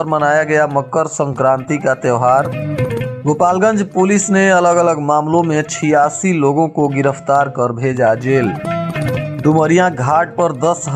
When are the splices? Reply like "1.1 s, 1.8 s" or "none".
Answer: none